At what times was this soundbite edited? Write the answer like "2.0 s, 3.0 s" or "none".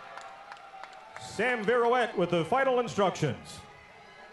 2.1 s